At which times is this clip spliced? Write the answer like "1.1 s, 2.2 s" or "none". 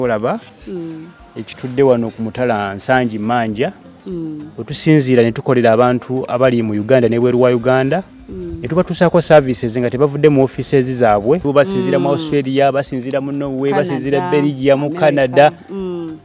11.4 s